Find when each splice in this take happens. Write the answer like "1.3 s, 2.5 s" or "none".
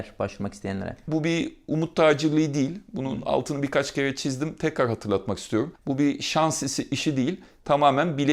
1.0 s, 5.8 s